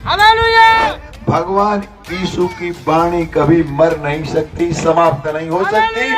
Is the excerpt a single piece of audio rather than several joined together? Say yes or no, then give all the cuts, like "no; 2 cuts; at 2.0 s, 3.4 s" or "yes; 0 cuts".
no; 1 cut; at 1.1 s